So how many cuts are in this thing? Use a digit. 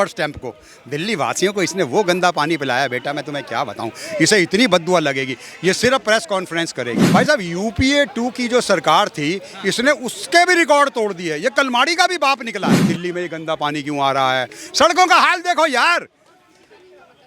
2